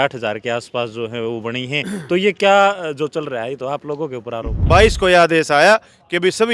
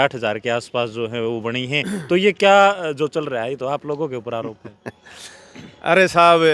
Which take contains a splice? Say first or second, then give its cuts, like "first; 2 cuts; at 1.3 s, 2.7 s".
first; 1 cut; at 4.6 s